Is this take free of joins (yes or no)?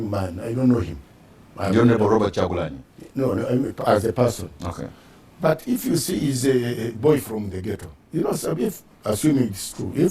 yes